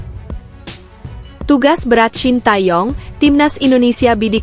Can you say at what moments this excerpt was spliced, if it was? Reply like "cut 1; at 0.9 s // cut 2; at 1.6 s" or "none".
cut 1; at 0.9 s